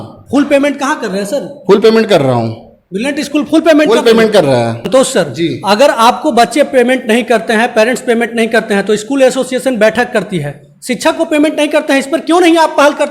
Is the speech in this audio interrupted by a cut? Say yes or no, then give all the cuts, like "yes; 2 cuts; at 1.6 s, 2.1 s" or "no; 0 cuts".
yes; 1 cut; at 4.9 s